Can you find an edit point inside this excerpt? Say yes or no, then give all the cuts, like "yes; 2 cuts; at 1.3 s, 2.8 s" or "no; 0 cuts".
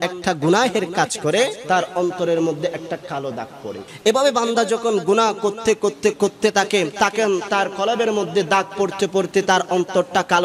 yes; 3 cuts; at 1.6 s, 3.8 s, 6.9 s